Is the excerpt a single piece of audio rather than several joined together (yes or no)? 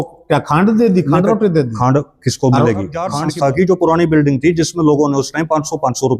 no